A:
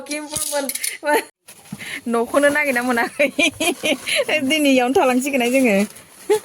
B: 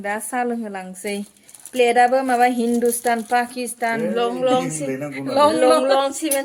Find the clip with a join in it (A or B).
A